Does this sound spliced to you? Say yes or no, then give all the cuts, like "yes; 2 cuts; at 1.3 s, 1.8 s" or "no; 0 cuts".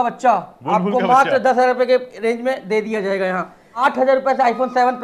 yes; 1 cut; at 3.6 s